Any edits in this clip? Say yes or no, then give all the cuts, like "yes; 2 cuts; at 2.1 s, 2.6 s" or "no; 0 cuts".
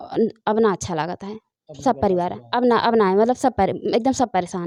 no; 0 cuts